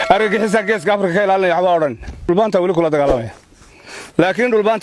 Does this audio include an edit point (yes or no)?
yes